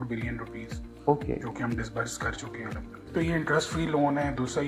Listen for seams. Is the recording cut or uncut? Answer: cut